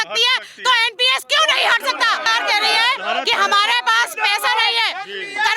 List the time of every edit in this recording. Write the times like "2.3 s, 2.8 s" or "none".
2.3 s